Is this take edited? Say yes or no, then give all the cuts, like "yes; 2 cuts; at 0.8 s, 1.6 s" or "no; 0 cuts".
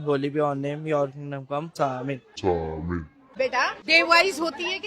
yes; 2 cuts; at 1.7 s, 3.3 s